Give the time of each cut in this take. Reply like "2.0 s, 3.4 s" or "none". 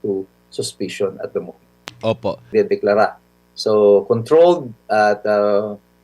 2.5 s